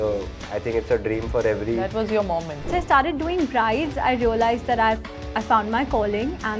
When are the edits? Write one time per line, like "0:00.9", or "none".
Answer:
0:02.7